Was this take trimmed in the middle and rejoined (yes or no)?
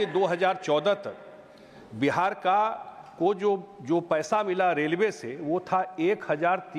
no